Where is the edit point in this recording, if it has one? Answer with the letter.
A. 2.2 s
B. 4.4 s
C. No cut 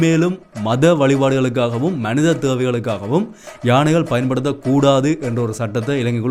C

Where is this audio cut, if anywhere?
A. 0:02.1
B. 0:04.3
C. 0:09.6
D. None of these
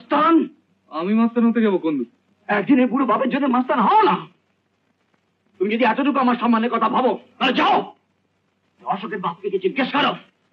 D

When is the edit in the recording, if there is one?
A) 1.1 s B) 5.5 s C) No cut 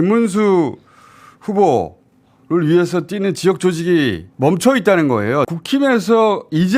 B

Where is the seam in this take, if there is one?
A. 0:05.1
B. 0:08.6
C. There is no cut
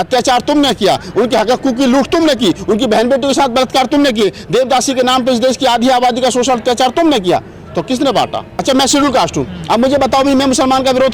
B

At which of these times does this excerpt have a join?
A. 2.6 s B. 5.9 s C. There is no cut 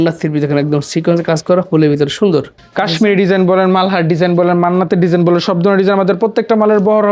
A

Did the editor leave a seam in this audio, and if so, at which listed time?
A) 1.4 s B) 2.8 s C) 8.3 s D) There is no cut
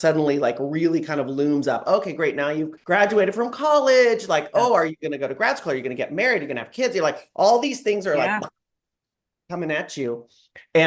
B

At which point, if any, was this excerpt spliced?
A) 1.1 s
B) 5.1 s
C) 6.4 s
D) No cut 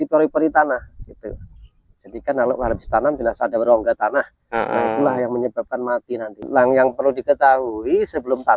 C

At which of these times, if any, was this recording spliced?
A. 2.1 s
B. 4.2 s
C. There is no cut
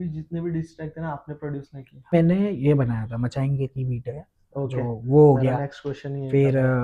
A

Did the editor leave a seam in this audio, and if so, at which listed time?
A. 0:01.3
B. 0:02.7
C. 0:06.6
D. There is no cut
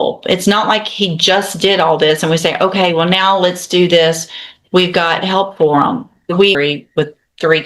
C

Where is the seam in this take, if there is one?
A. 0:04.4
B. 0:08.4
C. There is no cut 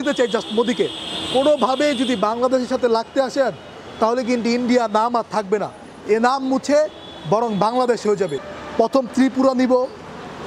B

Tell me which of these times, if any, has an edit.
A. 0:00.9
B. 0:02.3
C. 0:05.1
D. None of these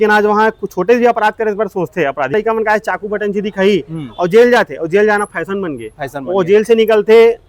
B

